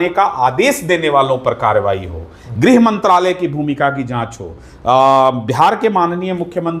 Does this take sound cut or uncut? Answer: uncut